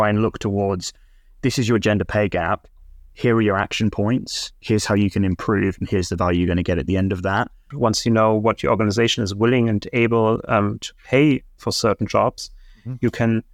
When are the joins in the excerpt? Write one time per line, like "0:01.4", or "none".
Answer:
0:07.7